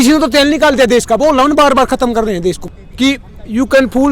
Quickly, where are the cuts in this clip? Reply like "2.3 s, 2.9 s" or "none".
2.6 s